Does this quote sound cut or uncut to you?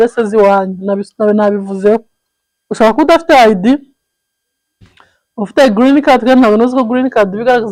uncut